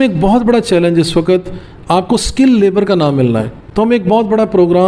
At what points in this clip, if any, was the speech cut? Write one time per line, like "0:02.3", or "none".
0:03.6